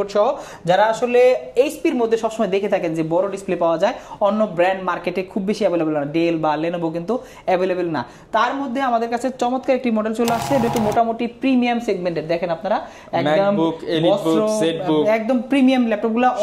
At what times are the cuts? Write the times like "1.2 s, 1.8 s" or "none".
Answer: 10.7 s